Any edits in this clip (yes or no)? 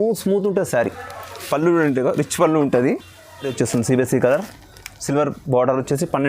yes